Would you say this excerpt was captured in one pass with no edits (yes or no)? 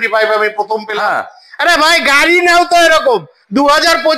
no